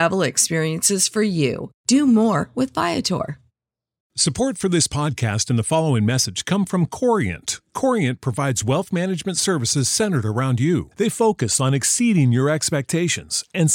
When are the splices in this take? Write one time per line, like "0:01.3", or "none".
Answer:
0:04.0